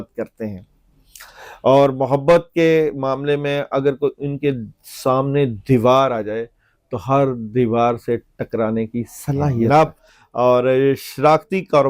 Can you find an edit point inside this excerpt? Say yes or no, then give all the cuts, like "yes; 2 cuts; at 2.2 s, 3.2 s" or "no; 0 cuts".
yes; 1 cut; at 9.7 s